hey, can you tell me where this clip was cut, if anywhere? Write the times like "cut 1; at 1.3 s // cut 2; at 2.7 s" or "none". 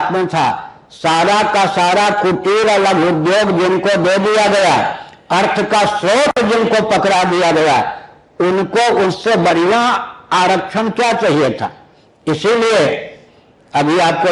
none

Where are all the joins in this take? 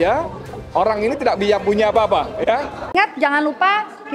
cut 1; at 2.8 s

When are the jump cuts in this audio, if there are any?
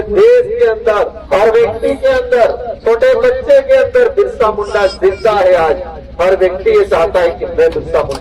cut 1; at 1.2 s // cut 2; at 2.7 s

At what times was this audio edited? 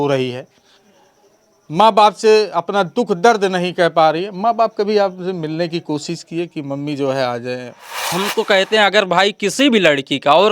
cut 1; at 8.1 s

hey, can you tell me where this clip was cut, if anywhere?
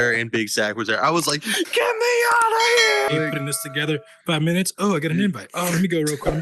cut 1; at 3.1 s

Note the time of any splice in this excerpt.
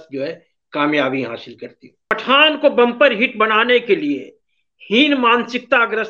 cut 1; at 2.1 s

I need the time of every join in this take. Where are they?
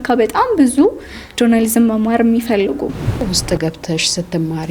cut 1; at 3.3 s

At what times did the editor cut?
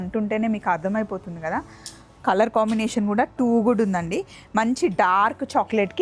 none

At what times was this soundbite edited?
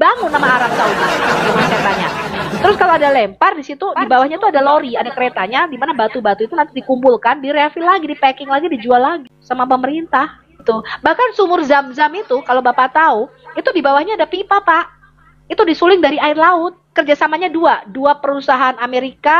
cut 1; at 9.3 s // cut 2; at 10.6 s // cut 3; at 16.8 s

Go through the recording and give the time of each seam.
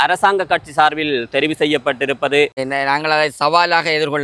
cut 1; at 2.6 s

